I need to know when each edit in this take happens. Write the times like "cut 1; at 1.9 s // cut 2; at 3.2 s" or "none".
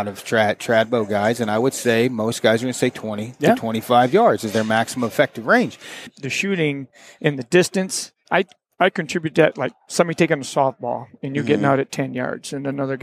cut 1; at 6.1 s

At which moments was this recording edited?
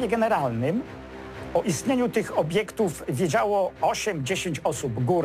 none

